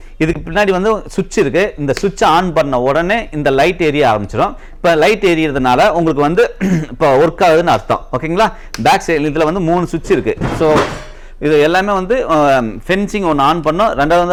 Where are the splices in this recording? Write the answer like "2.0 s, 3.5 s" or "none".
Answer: none

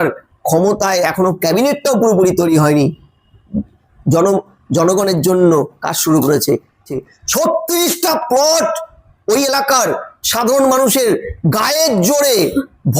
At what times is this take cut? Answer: 7.1 s

